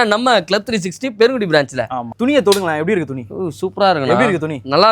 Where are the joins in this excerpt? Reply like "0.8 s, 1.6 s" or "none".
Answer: 2.0 s